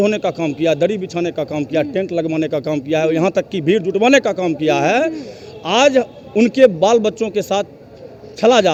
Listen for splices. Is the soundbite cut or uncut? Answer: uncut